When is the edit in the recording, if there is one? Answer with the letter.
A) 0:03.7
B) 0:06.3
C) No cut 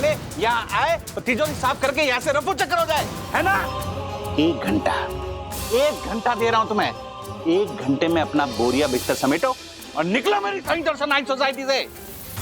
A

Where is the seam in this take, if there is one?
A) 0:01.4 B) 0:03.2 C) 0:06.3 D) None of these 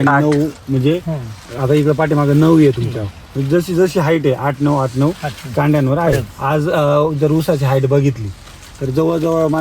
C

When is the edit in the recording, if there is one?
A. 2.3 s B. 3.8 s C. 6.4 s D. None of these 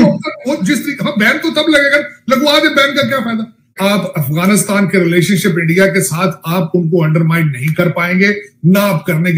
B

